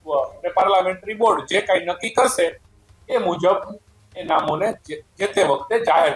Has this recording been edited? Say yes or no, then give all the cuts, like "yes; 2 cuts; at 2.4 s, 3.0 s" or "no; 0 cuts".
no; 0 cuts